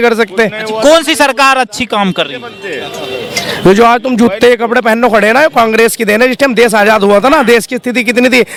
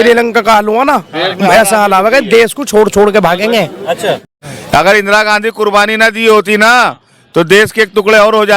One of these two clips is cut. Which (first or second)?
second